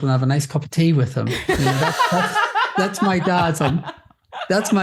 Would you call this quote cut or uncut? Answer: uncut